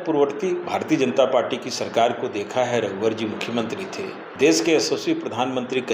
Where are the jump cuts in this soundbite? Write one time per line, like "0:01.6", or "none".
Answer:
0:04.2